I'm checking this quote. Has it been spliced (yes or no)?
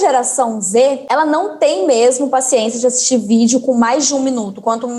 yes